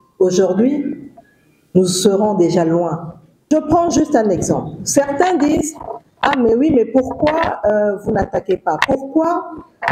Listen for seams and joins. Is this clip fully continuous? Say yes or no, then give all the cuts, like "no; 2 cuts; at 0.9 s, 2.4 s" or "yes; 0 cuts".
no; 1 cut; at 3.5 s